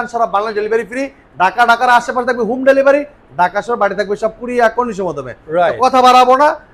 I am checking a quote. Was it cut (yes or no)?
no